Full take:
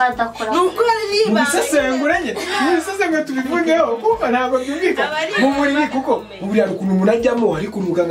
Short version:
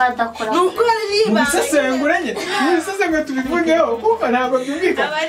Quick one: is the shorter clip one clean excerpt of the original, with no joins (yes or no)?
yes